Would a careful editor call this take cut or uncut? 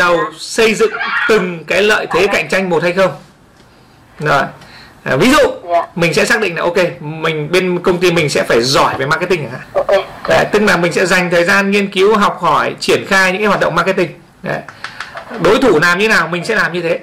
cut